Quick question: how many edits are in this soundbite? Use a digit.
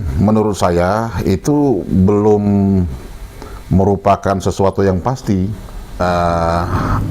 1